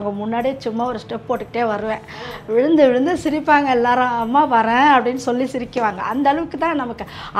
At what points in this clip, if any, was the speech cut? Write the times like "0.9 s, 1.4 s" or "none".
none